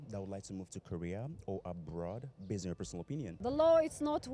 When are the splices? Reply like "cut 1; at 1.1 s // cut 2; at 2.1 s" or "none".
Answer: cut 1; at 3.4 s